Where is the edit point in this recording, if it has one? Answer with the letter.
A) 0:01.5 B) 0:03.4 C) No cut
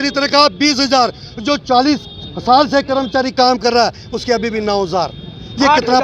C